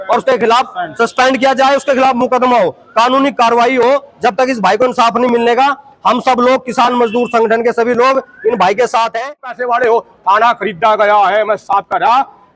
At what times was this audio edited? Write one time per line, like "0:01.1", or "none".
0:09.5